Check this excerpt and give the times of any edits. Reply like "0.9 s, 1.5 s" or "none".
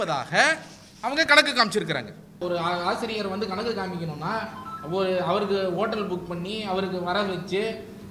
2.4 s